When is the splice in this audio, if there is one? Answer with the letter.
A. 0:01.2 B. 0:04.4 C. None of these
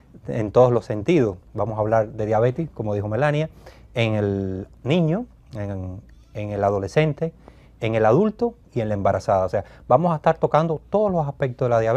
A